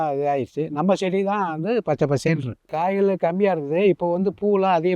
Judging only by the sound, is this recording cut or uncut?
cut